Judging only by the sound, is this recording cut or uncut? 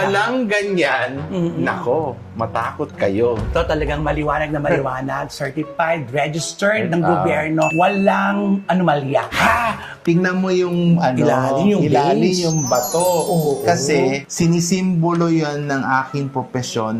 cut